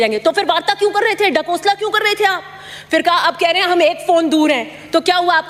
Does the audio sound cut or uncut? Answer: uncut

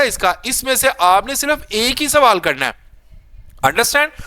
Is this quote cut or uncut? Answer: uncut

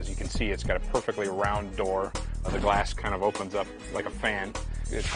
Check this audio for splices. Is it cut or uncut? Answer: uncut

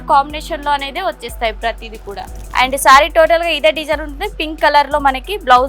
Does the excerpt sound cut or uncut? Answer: cut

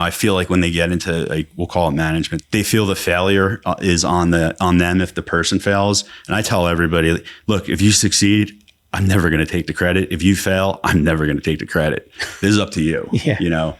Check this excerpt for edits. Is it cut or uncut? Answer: cut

